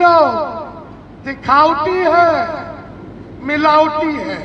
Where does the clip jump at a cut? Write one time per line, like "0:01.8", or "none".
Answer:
none